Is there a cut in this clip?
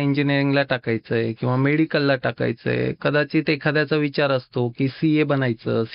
no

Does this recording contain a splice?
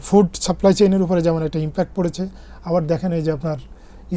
no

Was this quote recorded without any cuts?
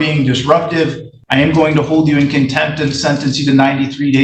no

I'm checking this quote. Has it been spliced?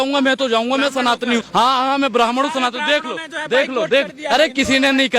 yes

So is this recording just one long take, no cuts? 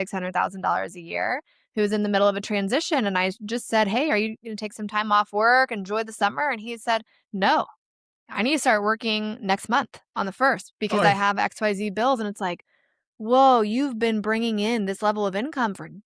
yes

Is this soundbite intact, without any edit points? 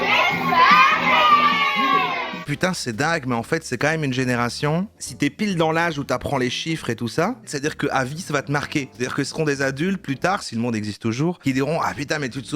no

